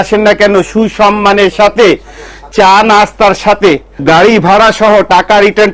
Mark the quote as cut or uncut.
uncut